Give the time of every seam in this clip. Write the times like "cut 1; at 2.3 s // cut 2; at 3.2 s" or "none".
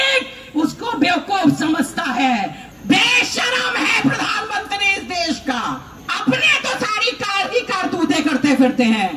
cut 1; at 2.7 s // cut 2; at 6.0 s